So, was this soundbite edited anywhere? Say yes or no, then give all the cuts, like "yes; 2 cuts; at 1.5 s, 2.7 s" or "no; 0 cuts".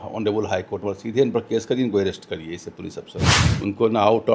yes; 1 cut; at 3.4 s